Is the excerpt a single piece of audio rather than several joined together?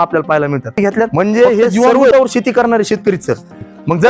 no; 1 cut; at 2.1 s

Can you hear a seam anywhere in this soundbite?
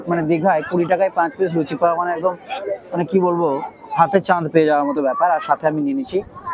no; 0 cuts

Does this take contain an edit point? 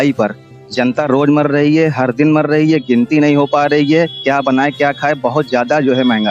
no; 0 cuts

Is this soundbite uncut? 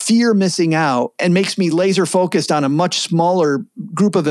no; 1 cut; at 1.1 s

